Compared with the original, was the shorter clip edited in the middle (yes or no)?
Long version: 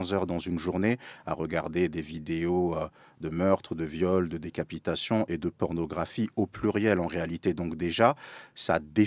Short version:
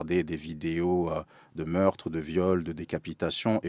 no